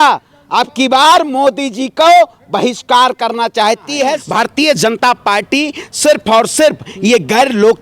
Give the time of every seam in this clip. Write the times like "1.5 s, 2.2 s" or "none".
4.2 s